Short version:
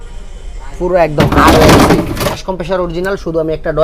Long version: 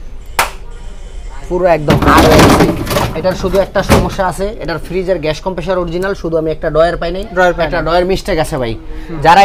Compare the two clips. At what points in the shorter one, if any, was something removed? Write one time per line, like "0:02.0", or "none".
0:02.4